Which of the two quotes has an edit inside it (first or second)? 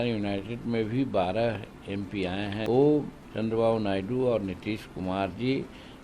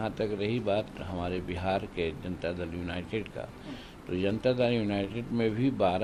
first